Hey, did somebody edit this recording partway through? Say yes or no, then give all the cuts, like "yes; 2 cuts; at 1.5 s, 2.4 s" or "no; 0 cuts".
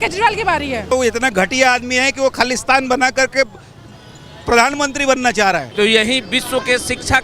yes; 2 cuts; at 0.9 s, 5.7 s